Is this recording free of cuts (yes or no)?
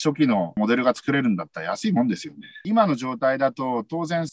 no